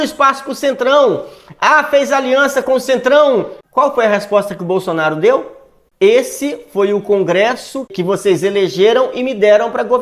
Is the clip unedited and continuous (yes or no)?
yes